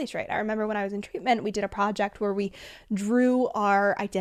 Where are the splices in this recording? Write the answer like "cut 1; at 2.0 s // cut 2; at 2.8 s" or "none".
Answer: none